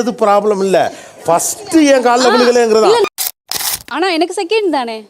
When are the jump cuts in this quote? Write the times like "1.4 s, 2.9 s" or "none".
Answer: 3.7 s

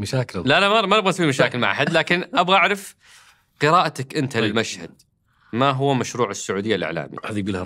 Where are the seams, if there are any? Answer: none

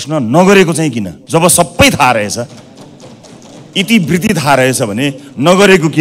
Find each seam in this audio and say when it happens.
1.1 s

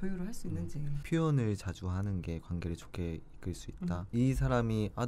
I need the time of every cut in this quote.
0.9 s, 4.1 s

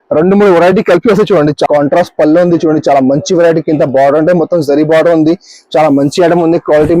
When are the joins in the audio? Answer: 1.7 s

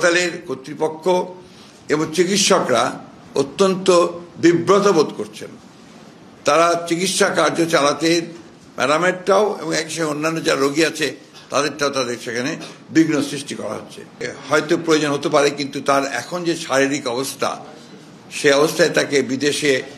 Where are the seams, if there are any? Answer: 14.3 s

